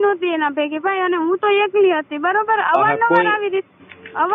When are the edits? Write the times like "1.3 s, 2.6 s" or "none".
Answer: none